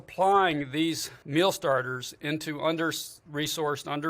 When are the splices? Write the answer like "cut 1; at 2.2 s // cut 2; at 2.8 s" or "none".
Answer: cut 1; at 1.1 s